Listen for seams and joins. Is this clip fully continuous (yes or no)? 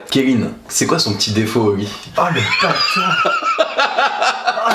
yes